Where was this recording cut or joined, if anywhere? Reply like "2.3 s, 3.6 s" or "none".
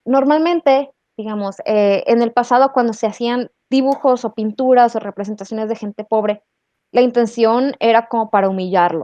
none